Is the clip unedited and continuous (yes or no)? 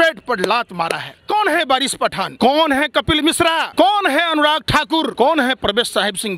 no